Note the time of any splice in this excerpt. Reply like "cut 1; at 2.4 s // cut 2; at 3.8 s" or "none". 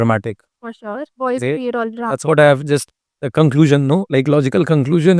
none

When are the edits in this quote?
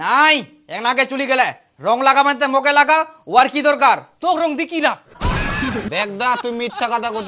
cut 1; at 5.9 s

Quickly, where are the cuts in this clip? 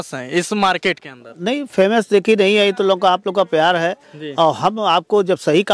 none

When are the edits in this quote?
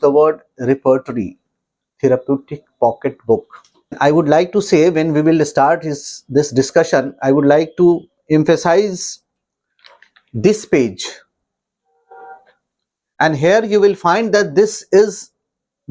cut 1; at 4.0 s

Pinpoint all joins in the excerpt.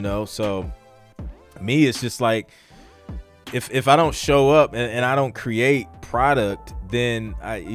none

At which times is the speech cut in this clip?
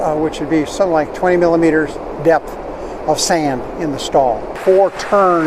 cut 1; at 4.5 s

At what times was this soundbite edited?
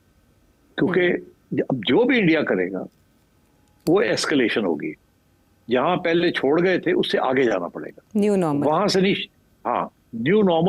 none

